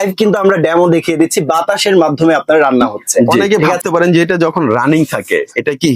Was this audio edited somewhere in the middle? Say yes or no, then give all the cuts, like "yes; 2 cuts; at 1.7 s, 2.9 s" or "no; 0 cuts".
yes; 1 cut; at 3.4 s